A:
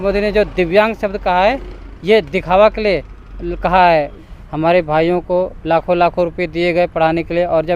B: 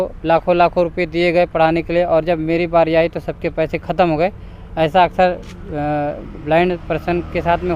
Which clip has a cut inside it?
A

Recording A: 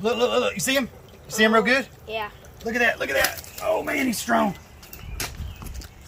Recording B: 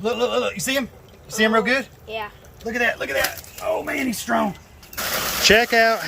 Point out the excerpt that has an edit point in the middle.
B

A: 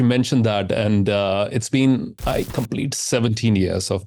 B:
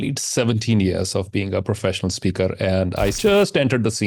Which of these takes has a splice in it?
B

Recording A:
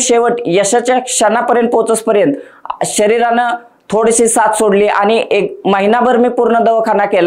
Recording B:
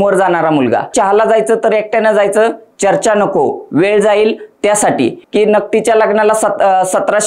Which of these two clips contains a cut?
B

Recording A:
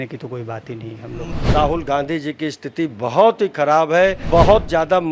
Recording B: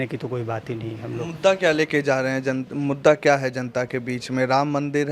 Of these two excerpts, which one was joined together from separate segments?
A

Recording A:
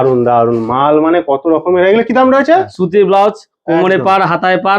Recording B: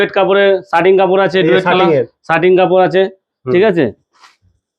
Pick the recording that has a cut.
A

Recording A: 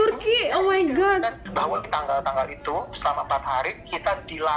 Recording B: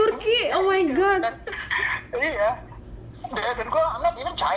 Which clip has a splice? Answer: A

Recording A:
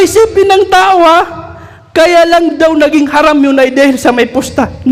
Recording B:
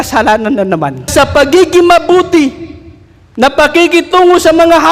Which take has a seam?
B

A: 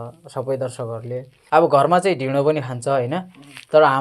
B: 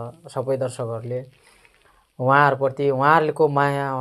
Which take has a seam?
A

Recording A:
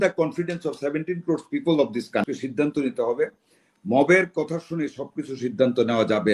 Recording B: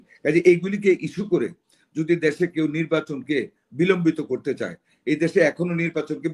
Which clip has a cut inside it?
A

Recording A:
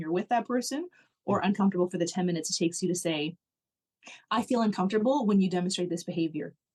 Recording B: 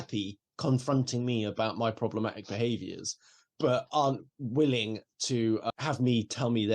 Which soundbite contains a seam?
B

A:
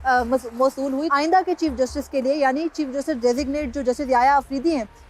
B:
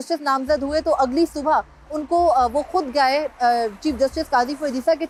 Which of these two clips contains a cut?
A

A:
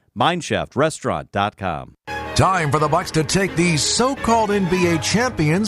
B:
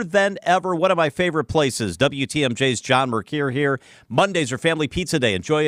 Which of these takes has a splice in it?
A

